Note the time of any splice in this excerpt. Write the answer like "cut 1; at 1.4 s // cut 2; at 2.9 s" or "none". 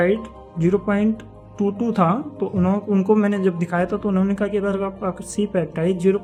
none